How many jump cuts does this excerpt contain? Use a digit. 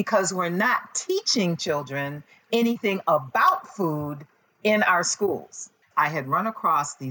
1